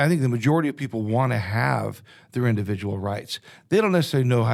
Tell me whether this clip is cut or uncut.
uncut